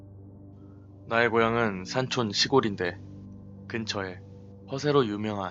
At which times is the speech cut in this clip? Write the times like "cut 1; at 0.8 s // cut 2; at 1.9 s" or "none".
cut 1; at 1.0 s